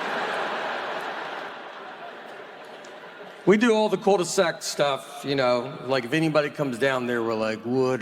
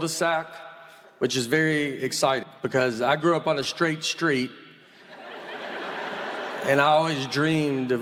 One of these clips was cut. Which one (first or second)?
first